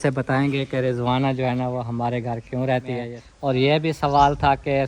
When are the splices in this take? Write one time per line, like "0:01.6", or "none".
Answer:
0:03.2